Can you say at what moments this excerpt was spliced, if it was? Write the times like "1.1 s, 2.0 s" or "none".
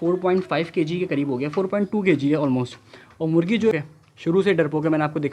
3.7 s